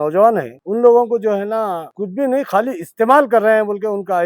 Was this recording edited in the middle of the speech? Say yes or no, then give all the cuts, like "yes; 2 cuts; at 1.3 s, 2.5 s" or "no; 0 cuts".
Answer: no; 0 cuts